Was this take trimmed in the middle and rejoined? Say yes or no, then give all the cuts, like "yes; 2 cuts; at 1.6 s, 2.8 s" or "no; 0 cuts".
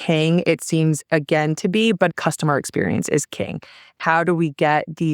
yes; 2 cuts; at 2.1 s, 3.9 s